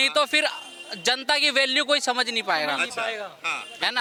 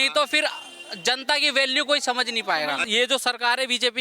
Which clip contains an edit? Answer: second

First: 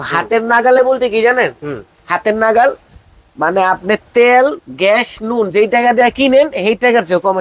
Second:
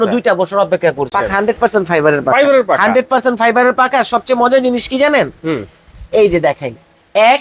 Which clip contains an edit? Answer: second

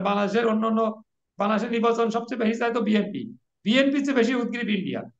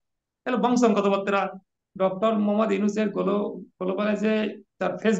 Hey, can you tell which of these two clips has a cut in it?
second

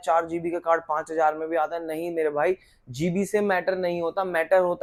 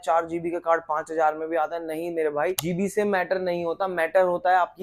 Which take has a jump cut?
second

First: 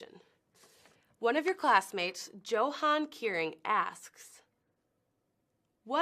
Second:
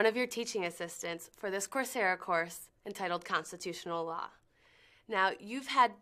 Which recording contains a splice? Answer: first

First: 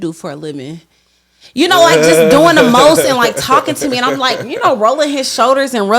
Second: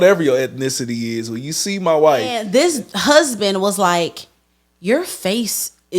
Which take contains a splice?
second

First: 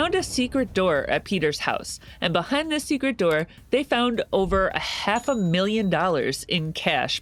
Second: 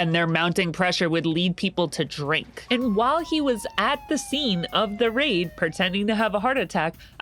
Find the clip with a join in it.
second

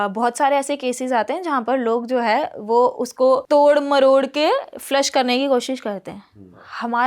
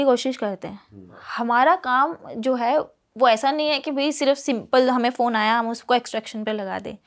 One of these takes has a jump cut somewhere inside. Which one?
first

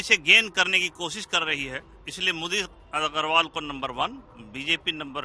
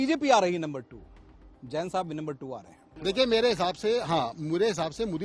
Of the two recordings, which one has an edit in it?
second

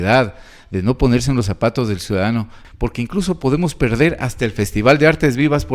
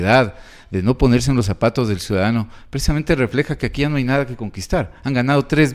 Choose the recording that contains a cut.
first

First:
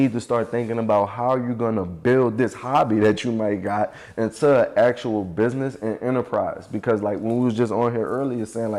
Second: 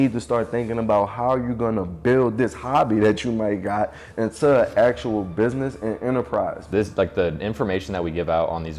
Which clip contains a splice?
second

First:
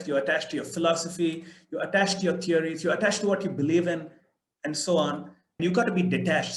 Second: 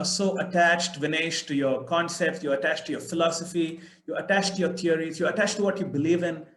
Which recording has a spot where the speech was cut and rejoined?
first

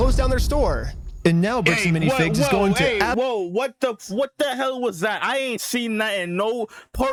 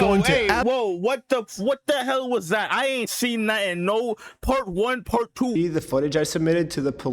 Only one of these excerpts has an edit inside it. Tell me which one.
second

